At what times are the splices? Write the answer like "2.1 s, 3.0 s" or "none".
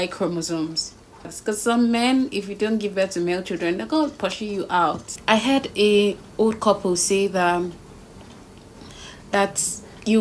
1.3 s, 5.2 s